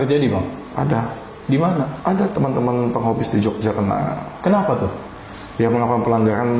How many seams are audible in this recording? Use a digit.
1